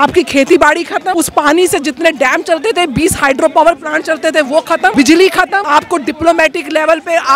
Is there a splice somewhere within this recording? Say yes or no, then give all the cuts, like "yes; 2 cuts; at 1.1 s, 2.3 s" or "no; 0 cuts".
yes; 3 cuts; at 1.1 s, 4.9 s, 5.6 s